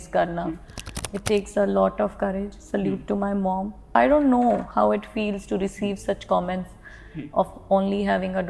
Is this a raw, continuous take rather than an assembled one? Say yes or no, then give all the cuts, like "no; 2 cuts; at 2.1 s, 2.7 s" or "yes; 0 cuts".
no; 1 cut; at 3.9 s